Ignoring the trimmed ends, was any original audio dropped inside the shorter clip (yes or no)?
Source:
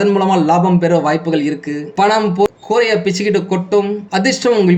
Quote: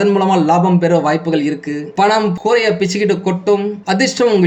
yes